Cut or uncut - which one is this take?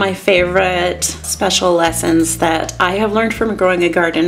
uncut